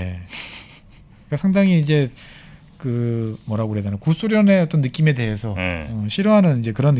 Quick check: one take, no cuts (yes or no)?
yes